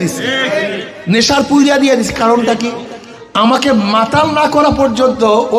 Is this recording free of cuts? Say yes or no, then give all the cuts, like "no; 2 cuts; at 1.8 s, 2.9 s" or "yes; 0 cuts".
yes; 0 cuts